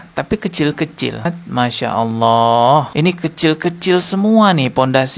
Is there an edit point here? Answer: yes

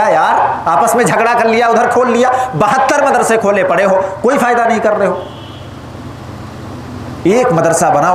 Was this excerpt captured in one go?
yes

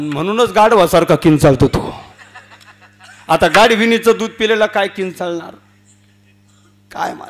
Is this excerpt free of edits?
yes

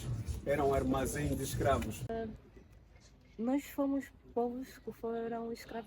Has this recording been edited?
yes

